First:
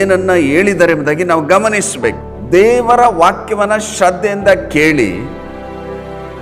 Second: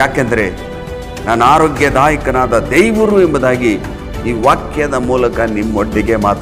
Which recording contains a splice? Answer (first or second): first